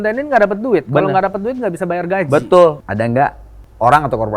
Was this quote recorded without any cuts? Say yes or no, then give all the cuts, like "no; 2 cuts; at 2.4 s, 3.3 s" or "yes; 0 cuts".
no; 1 cut; at 3.1 s